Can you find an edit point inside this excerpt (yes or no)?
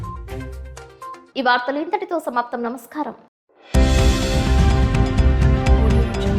no